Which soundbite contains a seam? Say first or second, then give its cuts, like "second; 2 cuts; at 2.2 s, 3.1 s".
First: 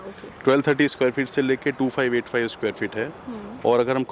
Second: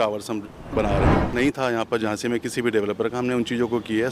second; 1 cut; at 1.2 s